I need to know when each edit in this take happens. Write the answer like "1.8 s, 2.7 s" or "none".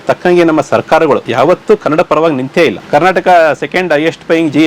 1.3 s, 2.8 s

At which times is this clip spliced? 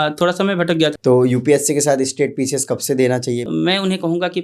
0.9 s, 3.4 s

